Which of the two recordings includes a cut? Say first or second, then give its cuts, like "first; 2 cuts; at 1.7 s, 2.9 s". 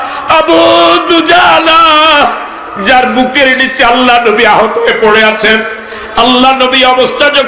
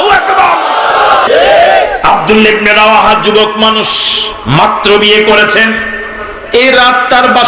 second; 1 cut; at 1.2 s